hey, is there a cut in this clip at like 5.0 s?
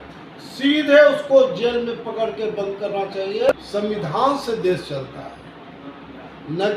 no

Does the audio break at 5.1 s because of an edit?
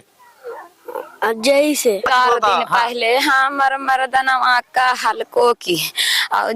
no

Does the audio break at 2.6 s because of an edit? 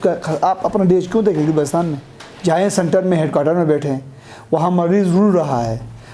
no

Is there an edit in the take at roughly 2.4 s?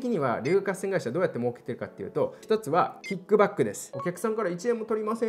yes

